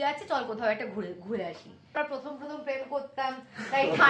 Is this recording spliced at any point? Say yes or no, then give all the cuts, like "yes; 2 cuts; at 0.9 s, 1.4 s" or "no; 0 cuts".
yes; 1 cut; at 1.9 s